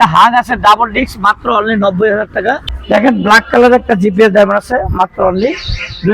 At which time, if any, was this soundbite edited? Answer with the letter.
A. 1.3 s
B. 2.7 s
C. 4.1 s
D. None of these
B